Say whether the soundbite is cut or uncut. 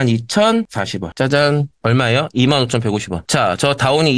uncut